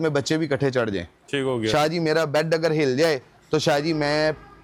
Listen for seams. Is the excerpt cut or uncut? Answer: uncut